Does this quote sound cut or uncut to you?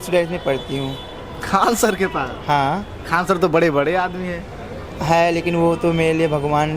uncut